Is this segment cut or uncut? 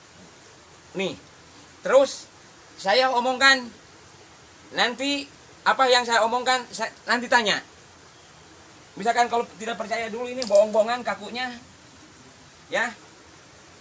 uncut